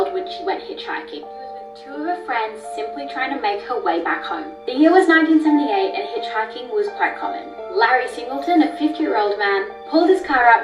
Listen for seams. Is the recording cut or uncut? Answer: uncut